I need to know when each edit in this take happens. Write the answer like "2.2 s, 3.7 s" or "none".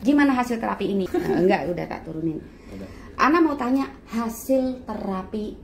1.1 s